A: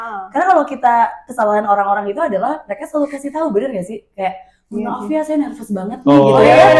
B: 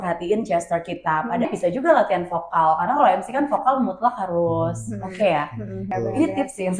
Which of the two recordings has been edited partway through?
B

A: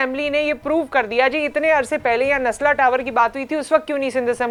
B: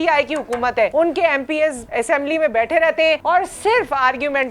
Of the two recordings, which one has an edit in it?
B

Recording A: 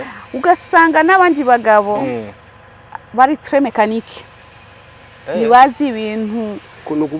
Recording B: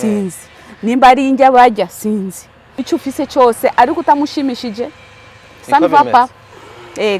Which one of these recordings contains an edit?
B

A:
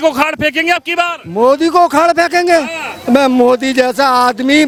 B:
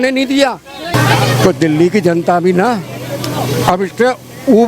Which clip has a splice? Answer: B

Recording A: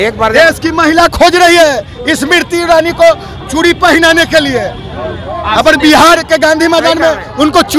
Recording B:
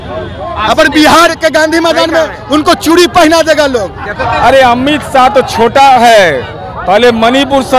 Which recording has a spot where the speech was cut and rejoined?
B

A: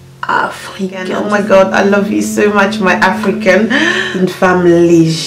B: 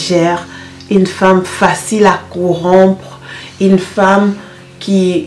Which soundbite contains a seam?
A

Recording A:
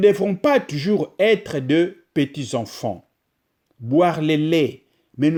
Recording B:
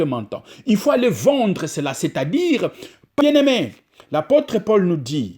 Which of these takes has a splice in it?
B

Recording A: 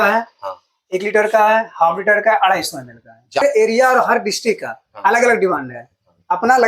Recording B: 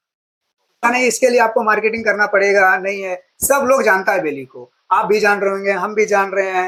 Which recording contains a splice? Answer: A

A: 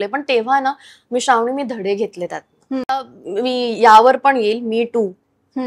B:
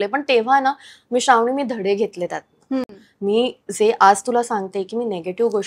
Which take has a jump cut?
A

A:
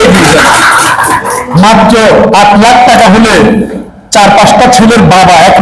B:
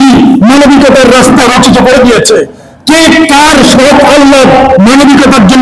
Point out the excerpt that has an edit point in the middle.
A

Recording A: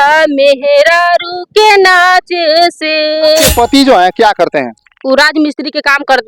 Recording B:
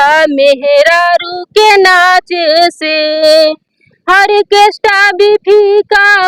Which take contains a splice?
A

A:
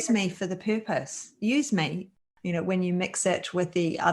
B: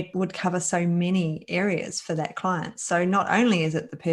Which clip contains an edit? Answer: A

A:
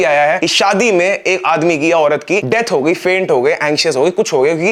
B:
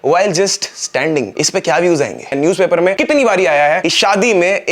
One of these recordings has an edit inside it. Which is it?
B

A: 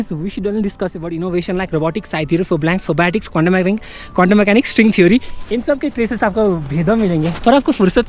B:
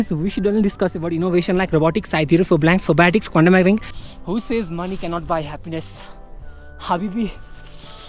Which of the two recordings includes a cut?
B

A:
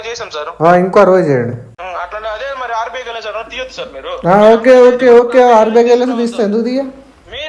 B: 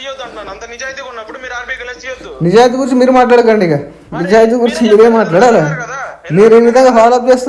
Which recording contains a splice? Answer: A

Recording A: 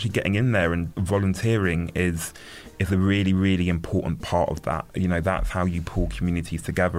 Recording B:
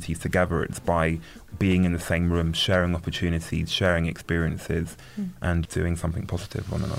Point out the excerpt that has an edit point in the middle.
A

